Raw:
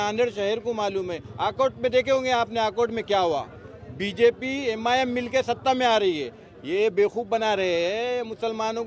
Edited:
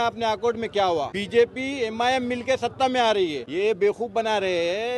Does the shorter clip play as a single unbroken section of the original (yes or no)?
no